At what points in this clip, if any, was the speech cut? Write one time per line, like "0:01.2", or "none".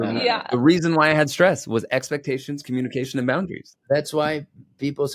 none